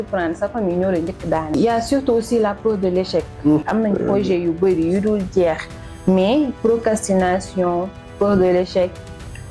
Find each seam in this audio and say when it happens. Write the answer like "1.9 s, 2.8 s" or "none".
1.5 s, 3.6 s